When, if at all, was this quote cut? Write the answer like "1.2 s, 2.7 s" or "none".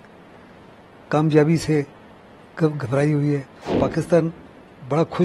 3.7 s